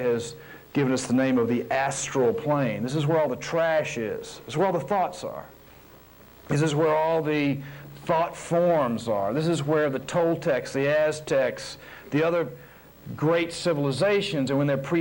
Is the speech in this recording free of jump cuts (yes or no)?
yes